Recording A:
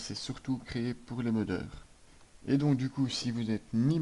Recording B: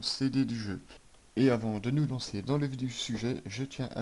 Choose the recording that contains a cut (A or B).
A